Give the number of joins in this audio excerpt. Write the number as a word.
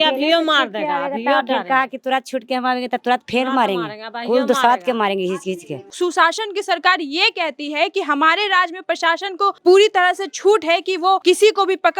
three